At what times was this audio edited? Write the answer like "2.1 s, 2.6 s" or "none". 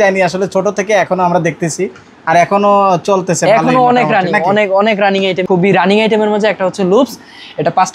5.4 s